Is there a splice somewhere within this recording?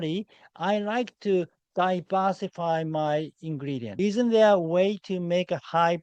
yes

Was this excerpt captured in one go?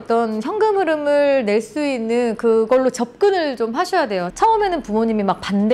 no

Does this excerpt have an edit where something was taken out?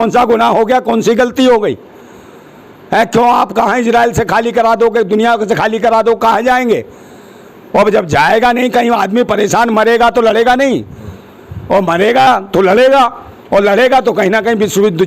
no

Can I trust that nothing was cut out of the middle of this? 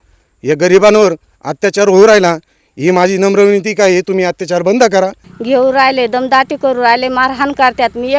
no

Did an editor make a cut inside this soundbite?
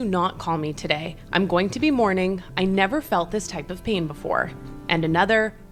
no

